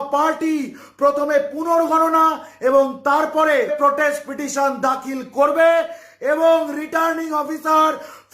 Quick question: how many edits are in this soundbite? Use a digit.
1